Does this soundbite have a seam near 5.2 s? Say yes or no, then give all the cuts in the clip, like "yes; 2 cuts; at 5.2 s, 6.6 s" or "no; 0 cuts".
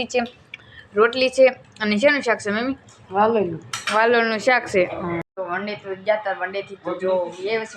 yes; 1 cut; at 5.2 s